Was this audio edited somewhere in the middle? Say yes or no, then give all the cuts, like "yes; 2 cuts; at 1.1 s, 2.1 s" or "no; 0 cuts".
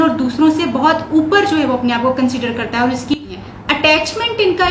yes; 1 cut; at 3.2 s